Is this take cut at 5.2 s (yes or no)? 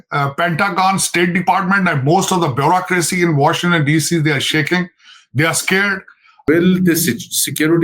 no